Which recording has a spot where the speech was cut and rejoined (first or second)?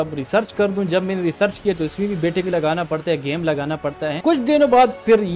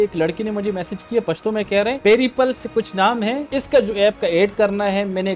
first